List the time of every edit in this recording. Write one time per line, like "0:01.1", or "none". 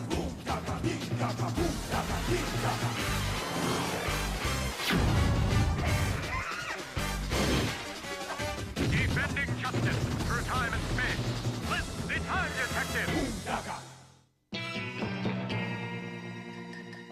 0:01.6